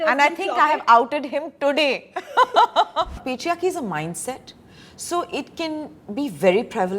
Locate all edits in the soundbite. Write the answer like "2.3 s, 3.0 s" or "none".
3.2 s